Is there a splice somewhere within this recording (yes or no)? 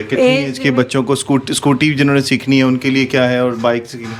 no